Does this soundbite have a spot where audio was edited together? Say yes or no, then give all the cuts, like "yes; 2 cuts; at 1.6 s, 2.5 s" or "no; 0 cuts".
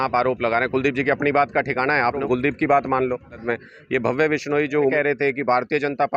yes; 3 cuts; at 2.2 s, 3.4 s, 4.9 s